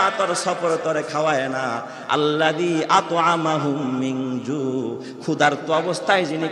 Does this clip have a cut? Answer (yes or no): no